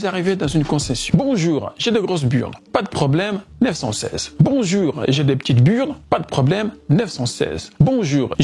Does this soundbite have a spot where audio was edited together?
no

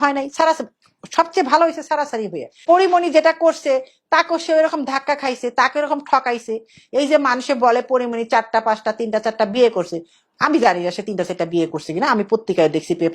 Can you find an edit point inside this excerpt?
yes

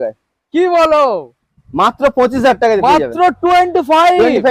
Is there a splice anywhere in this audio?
no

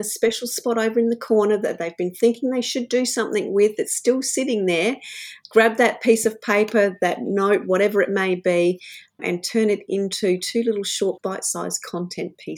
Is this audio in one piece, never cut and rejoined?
no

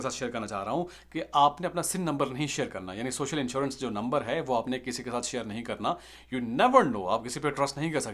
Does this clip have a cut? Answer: no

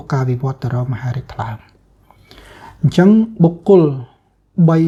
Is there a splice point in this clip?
no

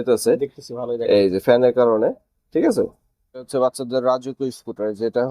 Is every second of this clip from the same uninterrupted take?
no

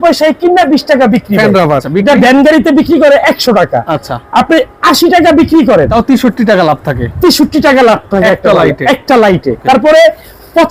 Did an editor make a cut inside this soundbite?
yes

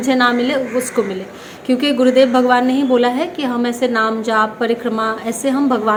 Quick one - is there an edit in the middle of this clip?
no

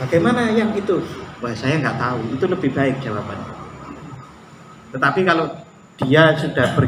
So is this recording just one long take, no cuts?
yes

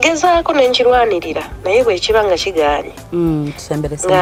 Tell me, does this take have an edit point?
no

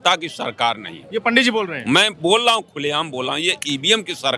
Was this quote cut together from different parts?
no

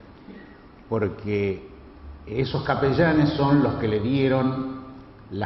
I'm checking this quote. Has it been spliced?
yes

